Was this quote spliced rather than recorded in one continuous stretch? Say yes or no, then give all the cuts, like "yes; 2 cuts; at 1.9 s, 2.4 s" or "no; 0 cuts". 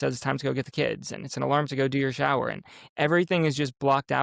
no; 0 cuts